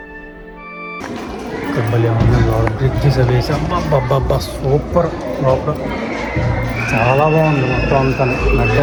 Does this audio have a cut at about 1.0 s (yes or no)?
no